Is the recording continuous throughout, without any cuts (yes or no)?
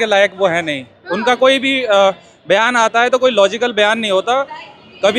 yes